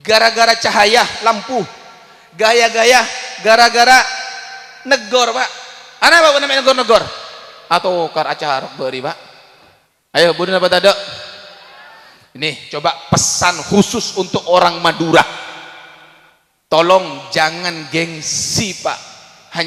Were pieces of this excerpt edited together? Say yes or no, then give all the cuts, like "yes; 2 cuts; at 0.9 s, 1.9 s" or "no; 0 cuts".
no; 0 cuts